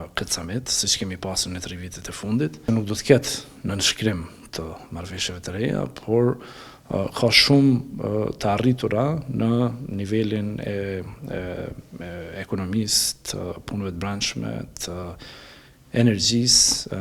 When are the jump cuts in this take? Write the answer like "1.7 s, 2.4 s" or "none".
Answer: 2.6 s